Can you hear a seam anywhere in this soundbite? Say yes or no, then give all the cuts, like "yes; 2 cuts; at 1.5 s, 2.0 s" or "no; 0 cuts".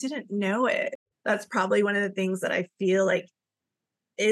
yes; 1 cut; at 1.0 s